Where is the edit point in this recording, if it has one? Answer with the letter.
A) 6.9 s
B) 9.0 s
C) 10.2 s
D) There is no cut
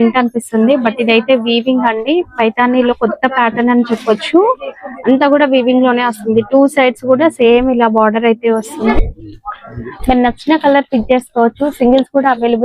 B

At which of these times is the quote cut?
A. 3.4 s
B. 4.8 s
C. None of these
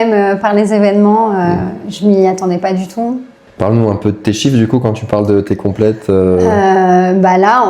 A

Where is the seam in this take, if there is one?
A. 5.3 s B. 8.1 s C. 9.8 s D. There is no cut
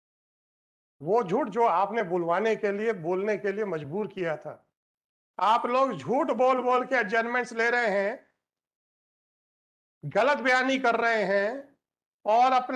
A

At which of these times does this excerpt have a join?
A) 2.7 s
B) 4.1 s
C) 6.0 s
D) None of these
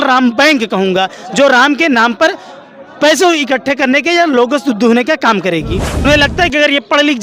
C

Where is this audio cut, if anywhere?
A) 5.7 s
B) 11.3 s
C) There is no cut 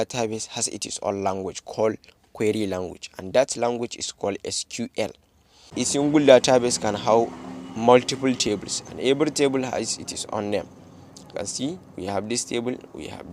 A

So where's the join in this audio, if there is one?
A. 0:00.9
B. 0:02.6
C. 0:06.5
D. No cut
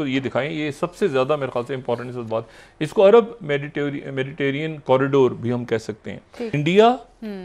C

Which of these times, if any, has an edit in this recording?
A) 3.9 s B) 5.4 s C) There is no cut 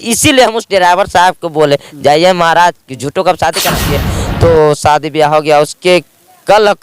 A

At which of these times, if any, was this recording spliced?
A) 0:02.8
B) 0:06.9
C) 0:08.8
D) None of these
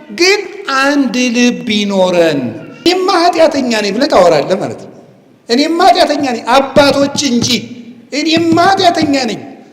A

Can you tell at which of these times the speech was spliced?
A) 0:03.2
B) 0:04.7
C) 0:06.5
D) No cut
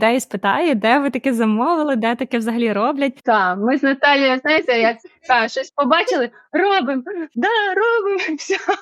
A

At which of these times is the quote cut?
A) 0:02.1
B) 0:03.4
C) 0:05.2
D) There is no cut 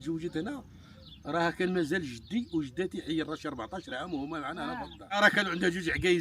C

